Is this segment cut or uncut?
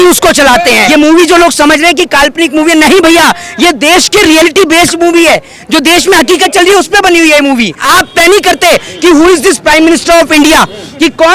cut